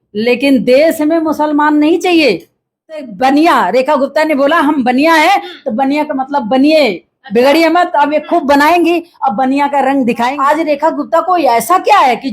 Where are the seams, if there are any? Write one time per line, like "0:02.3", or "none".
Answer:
0:03.1
0:10.3